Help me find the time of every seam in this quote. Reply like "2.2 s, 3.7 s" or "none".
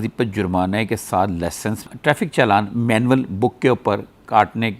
1.8 s